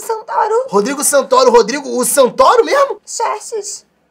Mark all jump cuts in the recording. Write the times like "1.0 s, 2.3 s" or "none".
3.0 s